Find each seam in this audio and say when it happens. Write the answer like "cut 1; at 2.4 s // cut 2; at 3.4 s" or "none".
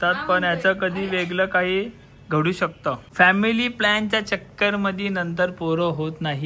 cut 1; at 3.0 s